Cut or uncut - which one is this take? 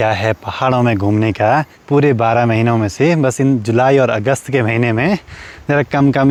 uncut